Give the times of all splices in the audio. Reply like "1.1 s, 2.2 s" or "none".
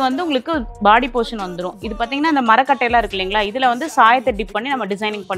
none